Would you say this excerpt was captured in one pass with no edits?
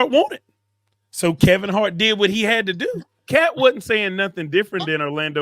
no; 1 cut; at 3.1 s

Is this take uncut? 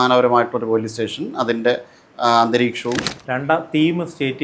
no; 1 cut; at 3.1 s

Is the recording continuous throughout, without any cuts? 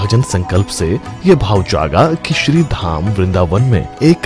no; 1 cut; at 1.4 s

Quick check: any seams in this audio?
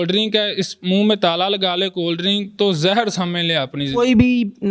no; 0 cuts

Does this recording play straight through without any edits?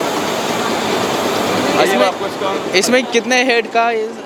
yes; 0 cuts

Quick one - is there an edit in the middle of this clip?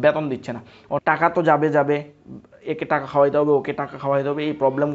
yes; 1 cut; at 1.0 s

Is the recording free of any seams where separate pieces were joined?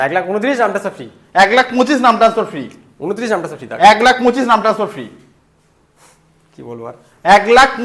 yes; 0 cuts

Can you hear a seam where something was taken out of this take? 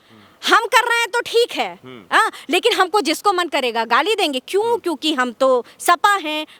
no; 0 cuts

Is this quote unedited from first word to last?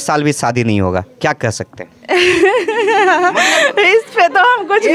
yes; 0 cuts

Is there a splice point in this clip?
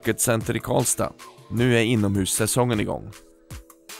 yes; 1 cut; at 3.1 s

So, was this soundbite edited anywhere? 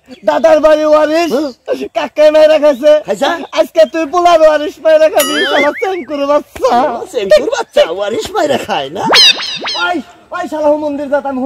no; 0 cuts

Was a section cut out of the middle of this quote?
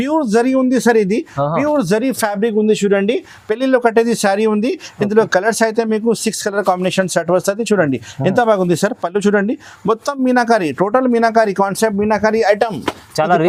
no; 0 cuts

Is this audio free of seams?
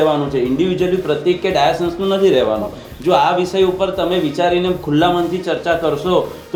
yes; 0 cuts

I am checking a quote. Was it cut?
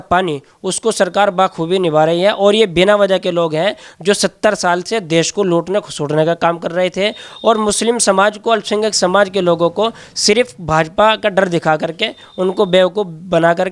no; 0 cuts

